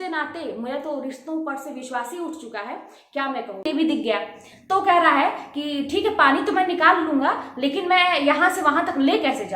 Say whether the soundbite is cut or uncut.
cut